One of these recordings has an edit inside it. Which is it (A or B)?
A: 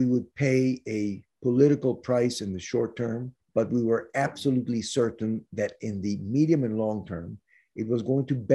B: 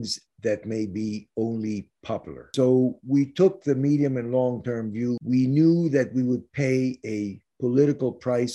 B